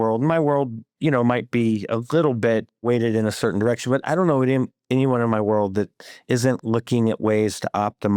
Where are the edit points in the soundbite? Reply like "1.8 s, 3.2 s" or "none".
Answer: 2.8 s